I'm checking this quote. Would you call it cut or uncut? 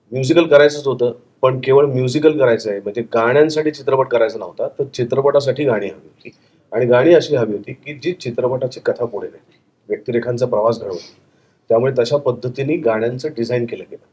uncut